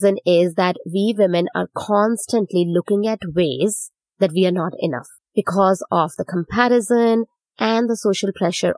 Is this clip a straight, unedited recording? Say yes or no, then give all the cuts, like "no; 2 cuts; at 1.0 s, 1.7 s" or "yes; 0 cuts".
yes; 0 cuts